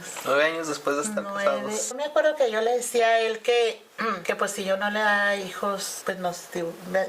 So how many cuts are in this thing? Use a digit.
3